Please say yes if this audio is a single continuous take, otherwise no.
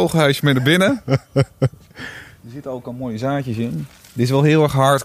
yes